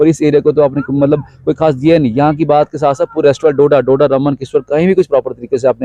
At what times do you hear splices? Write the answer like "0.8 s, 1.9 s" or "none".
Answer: none

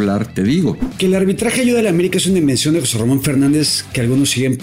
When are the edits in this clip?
0.9 s

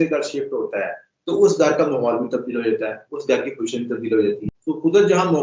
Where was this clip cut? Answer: 4.5 s

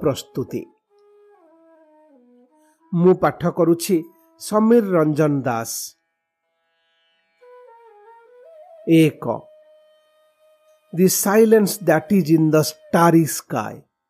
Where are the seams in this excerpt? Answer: 0.7 s, 2.9 s

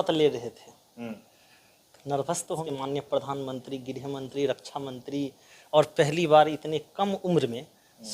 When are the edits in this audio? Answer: 2.6 s

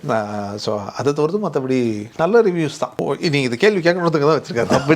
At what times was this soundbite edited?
3.0 s

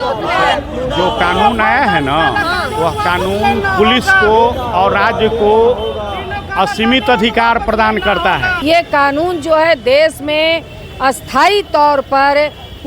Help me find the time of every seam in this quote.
8.6 s

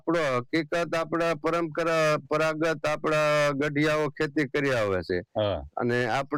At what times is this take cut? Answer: none

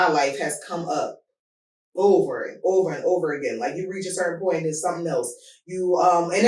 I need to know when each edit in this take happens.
none

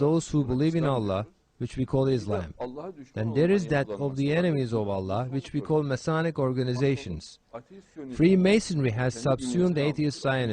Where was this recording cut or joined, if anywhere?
none

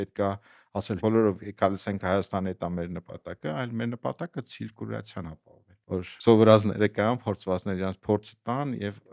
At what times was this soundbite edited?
1.0 s, 6.0 s

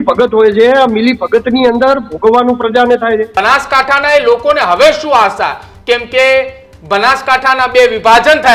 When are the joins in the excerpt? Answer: 3.3 s

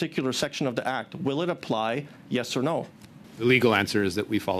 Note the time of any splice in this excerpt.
3.2 s

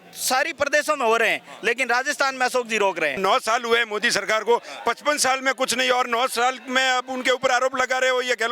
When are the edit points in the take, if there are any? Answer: 3.2 s

